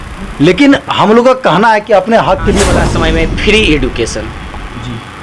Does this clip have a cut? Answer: yes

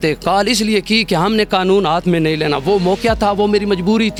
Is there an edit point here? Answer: no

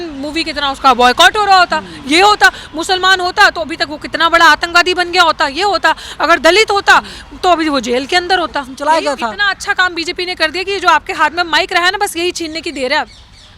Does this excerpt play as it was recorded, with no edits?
no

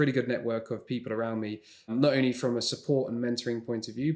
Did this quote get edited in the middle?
yes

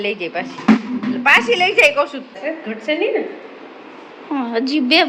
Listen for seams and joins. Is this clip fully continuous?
no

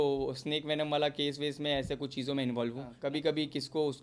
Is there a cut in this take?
yes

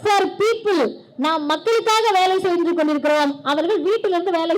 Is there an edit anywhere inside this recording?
no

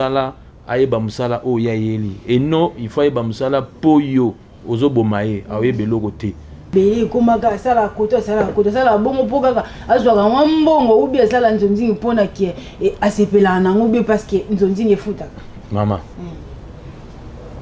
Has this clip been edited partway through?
yes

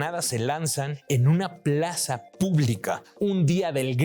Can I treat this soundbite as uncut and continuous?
no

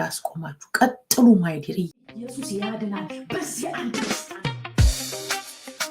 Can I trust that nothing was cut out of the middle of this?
no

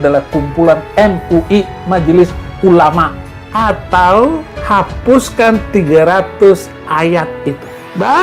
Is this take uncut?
no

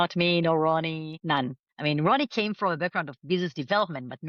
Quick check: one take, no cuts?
yes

